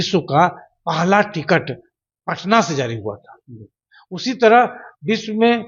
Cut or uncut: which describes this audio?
uncut